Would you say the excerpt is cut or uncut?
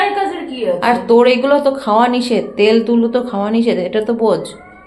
uncut